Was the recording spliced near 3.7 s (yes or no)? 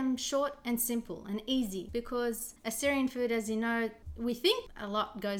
no